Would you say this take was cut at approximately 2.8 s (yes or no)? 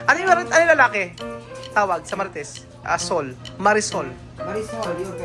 yes